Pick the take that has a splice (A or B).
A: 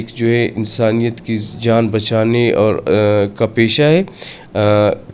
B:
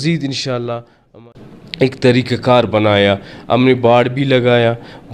B